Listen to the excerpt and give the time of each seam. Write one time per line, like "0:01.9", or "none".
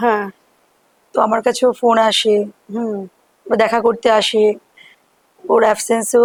none

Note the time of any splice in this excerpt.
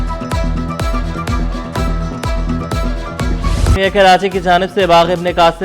0:03.8

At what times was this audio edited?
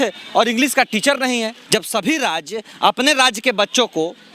0:01.6

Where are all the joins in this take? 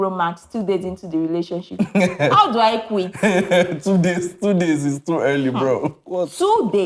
none

